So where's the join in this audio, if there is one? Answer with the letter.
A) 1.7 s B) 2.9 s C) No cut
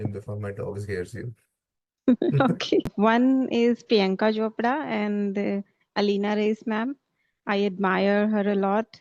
B